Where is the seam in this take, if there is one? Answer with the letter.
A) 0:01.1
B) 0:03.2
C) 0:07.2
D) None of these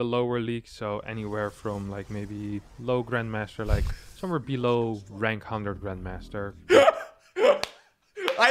B